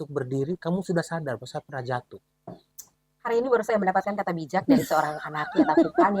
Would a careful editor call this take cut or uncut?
uncut